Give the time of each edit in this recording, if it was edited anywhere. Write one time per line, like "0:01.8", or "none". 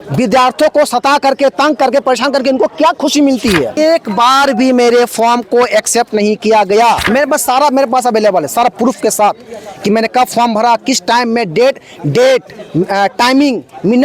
0:03.8
0:07.0